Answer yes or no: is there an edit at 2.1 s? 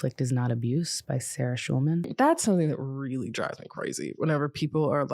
yes